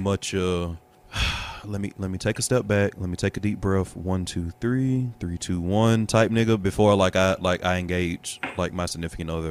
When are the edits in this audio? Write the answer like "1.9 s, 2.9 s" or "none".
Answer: none

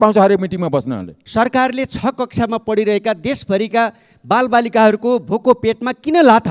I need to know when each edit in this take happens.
1.2 s

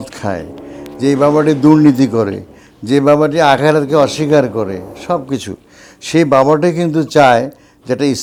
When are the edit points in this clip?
none

